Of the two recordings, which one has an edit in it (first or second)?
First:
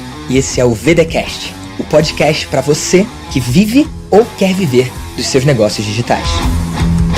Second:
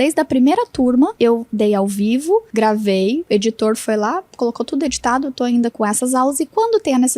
second